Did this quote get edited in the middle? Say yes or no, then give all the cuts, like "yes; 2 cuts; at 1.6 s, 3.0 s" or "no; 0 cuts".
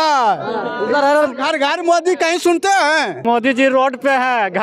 yes; 1 cut; at 3.2 s